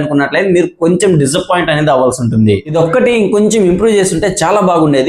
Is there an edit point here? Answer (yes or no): no